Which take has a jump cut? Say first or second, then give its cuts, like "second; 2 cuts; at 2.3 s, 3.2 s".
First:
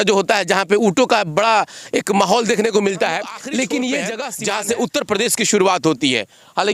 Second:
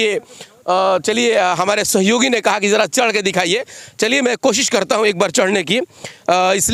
first; 1 cut; at 4.3 s